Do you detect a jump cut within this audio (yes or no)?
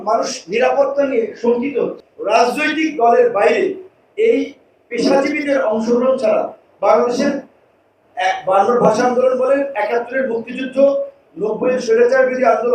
yes